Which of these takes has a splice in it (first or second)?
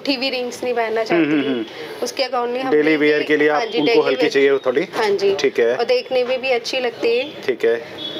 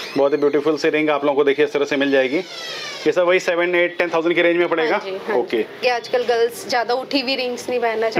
second